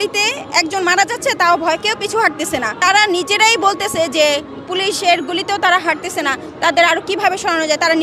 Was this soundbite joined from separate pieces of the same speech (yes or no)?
no